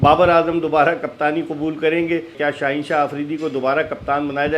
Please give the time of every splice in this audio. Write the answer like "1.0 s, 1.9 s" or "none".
2.3 s